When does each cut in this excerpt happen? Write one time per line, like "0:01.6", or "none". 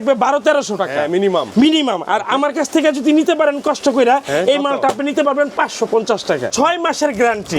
0:06.5